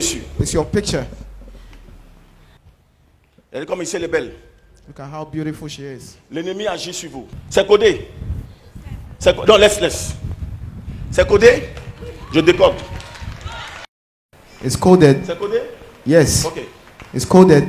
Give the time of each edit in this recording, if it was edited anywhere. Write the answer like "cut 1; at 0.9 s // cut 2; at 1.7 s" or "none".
none